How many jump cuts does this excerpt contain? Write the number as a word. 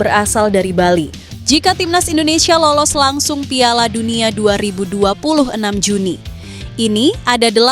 one